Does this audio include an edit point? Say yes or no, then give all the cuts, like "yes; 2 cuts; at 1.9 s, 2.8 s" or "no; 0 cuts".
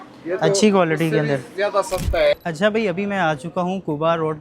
yes; 1 cut; at 2.3 s